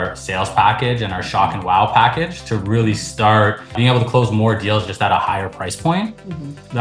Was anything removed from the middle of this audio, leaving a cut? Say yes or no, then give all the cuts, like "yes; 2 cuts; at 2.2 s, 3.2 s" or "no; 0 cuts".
no; 0 cuts